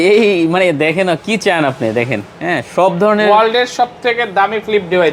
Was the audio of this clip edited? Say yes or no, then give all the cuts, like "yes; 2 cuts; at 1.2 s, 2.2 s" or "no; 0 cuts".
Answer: no; 0 cuts